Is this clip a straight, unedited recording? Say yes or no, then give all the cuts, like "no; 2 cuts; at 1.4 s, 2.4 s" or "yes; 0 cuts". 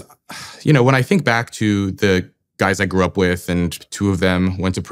no; 1 cut; at 3.8 s